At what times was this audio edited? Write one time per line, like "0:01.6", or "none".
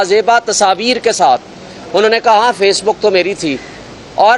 none